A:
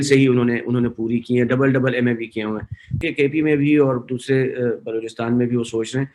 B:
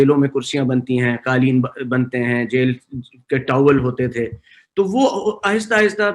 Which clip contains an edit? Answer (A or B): A